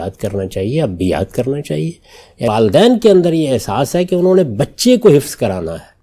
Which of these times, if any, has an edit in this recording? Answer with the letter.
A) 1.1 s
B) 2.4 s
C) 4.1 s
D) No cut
B